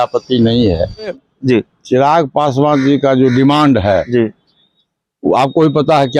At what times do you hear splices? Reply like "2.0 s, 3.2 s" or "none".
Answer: 1.2 s